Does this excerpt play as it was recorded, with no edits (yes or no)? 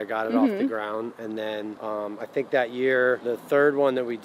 no